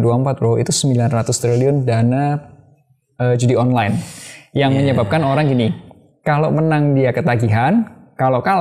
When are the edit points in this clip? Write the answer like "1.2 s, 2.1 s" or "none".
none